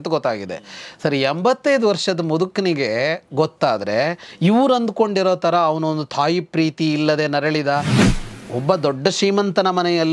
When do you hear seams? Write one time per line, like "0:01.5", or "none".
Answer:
0:08.0